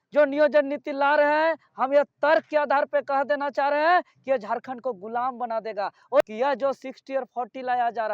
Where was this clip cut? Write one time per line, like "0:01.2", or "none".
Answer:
0:06.2